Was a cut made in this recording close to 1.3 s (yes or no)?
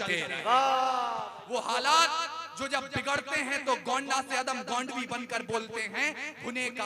yes